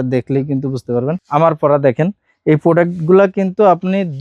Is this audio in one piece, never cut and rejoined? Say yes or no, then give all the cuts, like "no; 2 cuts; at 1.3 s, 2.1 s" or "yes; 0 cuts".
no; 1 cut; at 1.2 s